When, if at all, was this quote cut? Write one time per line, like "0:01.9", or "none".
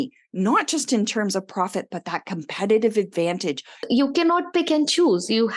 0:03.9

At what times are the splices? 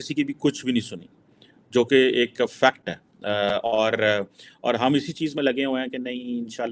none

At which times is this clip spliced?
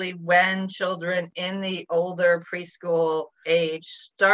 0:03.3

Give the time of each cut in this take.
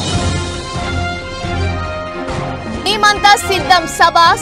none

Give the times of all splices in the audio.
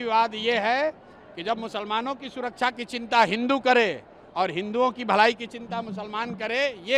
none

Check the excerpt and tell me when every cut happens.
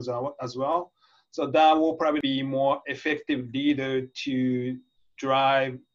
0:02.2

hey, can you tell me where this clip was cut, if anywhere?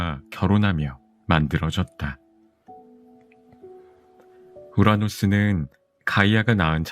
0:02.9
0:04.5

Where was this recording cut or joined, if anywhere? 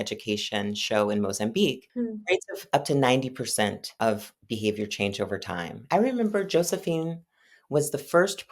0:01.8
0:03.9
0:05.7

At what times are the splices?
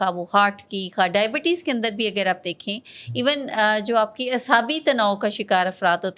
none

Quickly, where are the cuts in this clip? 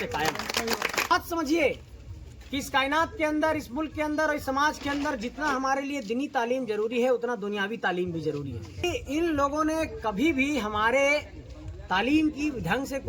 0:01.1
0:08.8

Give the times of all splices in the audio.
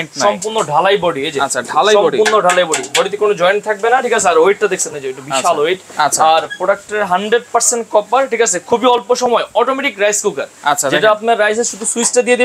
none

